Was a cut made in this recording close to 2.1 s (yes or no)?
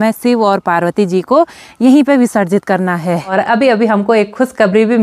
no